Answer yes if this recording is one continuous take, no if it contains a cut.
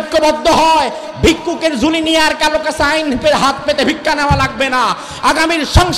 yes